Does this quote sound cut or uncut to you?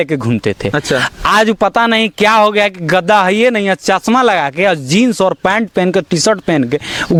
uncut